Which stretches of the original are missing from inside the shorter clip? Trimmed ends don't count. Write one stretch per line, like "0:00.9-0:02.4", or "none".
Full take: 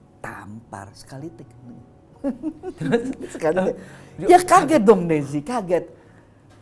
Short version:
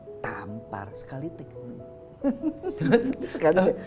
none